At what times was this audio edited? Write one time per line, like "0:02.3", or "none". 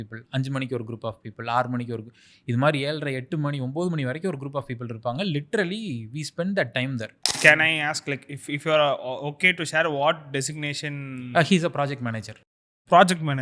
0:07.3